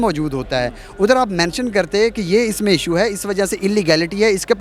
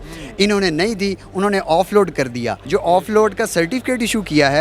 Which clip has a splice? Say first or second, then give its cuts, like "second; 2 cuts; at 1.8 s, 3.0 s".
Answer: second; 1 cut; at 2.6 s